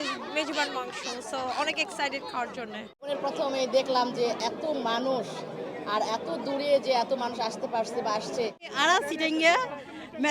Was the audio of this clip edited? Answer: yes; 2 cuts; at 3.1 s, 8.6 s

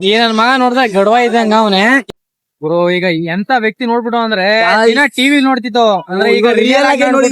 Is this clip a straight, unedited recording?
no; 1 cut; at 2.0 s

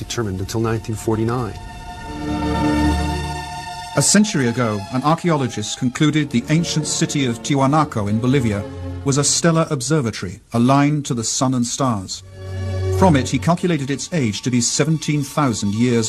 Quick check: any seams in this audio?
no; 0 cuts

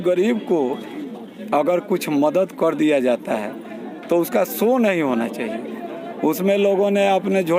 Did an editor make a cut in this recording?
no; 0 cuts

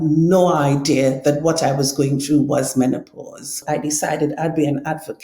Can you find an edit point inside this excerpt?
yes; 1 cut; at 3.6 s

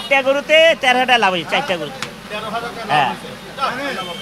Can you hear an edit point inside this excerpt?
no; 0 cuts

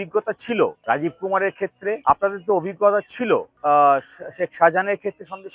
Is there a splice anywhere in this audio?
yes; 3 cuts; at 0.8 s, 2.0 s, 3.5 s

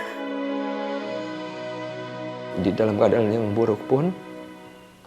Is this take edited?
yes; 2 cuts; at 2.5 s, 4.2 s

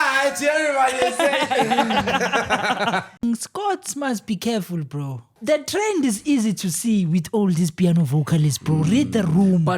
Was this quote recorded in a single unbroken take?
no; 2 cuts; at 3.2 s, 5.3 s

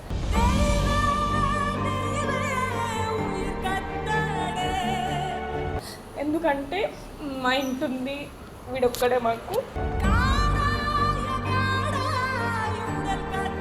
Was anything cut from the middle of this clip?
no; 0 cuts

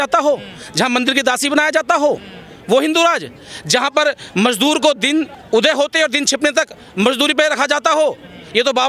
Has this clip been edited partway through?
no; 0 cuts

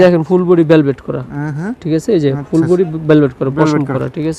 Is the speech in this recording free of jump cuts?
yes; 0 cuts

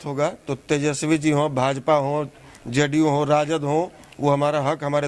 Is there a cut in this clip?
no; 0 cuts

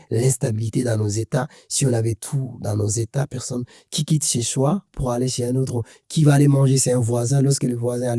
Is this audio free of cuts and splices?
yes; 0 cuts

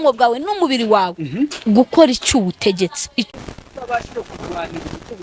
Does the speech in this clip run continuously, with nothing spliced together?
no; 1 cut; at 3.3 s

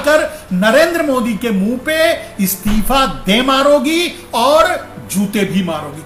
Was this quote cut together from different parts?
no; 0 cuts

